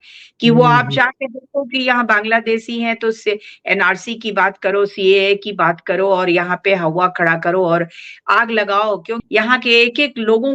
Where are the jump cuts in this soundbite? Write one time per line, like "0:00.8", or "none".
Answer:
0:09.2